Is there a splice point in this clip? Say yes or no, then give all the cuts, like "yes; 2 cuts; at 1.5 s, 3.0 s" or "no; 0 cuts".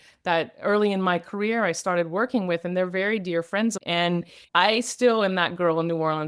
yes; 1 cut; at 3.8 s